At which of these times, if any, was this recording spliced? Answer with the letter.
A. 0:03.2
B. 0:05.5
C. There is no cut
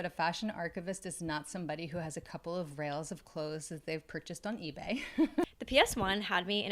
B